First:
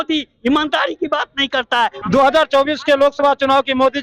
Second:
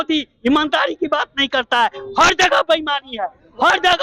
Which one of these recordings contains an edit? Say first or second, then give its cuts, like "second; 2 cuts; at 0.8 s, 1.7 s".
first; 1 cut; at 2.0 s